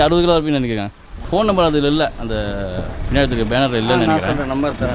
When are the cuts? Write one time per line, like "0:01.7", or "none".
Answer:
0:01.3

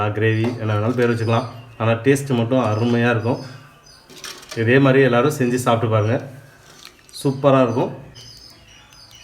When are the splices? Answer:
0:08.2

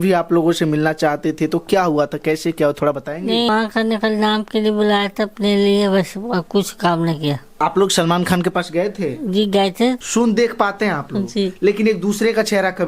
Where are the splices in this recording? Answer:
0:03.5
0:07.6
0:10.0

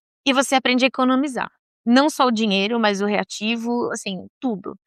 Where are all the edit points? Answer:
none

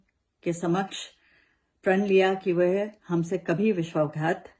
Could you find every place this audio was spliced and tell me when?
none

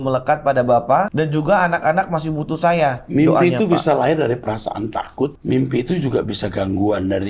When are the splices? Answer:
0:01.1
0:03.0
0:05.4

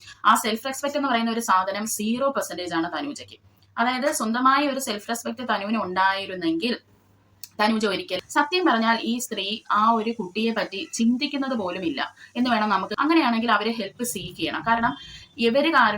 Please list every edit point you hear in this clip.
0:08.2
0:12.9

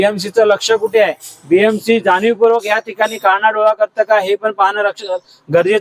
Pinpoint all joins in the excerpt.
none

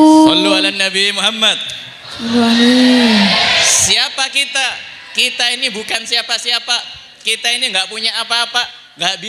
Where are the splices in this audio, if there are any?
none

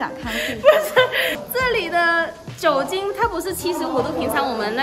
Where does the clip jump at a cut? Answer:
0:01.4

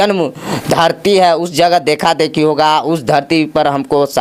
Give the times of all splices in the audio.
none

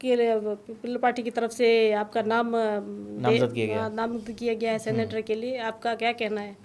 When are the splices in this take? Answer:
none

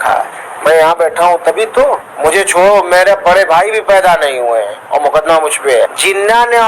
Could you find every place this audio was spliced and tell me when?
0:02.1
0:05.9

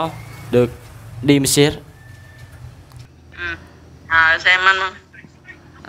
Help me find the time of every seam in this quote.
0:03.0

